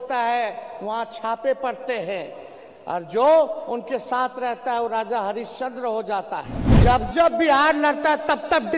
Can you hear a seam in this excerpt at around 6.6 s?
yes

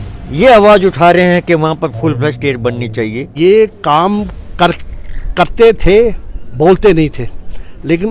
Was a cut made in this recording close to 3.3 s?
yes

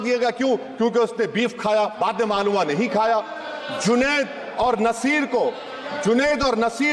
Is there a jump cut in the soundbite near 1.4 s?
no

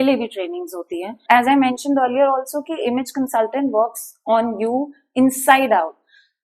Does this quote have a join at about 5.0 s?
no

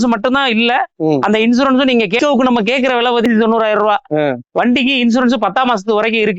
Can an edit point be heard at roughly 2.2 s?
yes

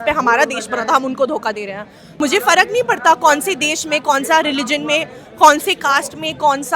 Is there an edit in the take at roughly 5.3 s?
no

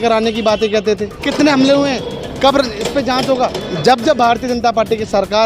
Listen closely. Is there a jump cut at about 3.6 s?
yes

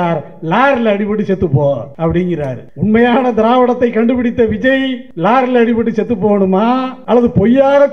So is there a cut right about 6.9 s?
yes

